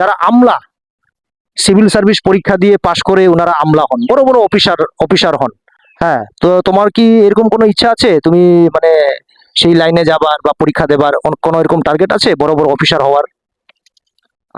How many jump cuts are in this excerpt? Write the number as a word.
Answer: zero